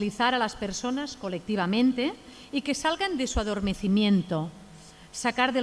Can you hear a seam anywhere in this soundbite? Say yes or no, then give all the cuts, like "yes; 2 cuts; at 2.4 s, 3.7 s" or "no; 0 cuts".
no; 0 cuts